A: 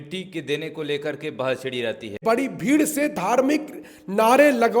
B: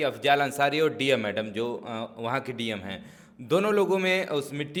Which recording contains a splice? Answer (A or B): A